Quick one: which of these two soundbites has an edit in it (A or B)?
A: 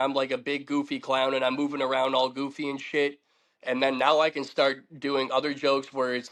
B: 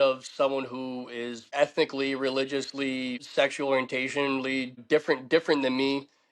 B